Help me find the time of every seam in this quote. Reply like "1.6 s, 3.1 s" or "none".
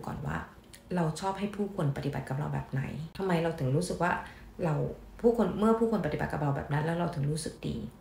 3.1 s